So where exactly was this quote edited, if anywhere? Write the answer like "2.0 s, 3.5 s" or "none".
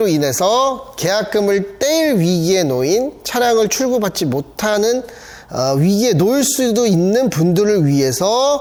none